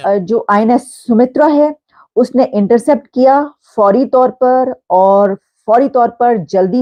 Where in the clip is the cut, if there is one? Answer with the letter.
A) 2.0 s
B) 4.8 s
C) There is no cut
C